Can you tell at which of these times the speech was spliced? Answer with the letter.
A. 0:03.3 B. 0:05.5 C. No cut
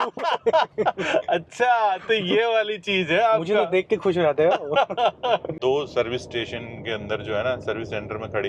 B